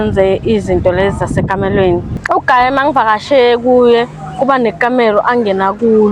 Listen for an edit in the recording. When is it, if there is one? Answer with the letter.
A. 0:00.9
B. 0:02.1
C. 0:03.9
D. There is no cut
B